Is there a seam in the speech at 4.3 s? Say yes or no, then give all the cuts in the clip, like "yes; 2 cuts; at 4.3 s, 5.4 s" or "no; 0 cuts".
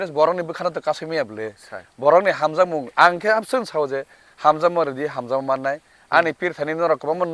no; 1 cut; at 6.0 s